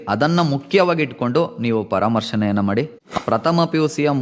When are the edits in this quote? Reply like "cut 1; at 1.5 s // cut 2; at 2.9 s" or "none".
cut 1; at 3.1 s